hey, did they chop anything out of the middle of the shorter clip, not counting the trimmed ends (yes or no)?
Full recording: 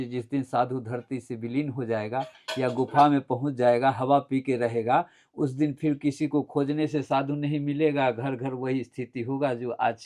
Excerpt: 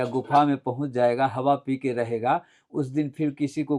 no